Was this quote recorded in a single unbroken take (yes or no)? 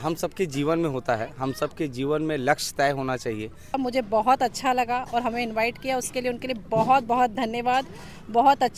no